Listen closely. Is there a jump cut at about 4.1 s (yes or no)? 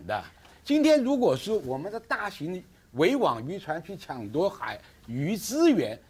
yes